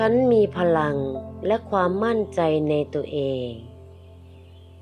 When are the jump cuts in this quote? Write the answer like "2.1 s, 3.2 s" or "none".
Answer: 3.6 s